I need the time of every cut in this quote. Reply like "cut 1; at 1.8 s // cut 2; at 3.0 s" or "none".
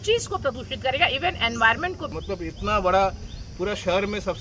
cut 1; at 2.2 s